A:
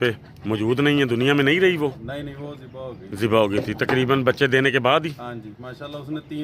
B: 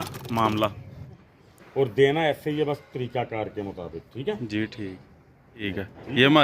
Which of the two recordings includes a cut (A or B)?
B